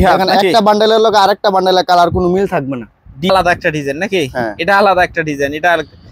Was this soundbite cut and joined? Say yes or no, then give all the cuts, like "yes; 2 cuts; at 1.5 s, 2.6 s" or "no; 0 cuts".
yes; 1 cut; at 3.3 s